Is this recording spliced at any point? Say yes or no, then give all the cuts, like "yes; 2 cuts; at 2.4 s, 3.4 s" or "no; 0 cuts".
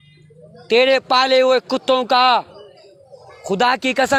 no; 0 cuts